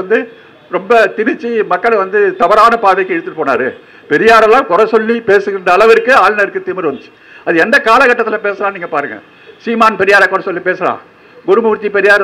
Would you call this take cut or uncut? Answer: uncut